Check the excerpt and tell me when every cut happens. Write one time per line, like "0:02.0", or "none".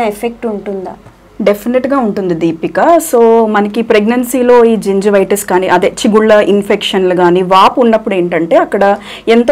none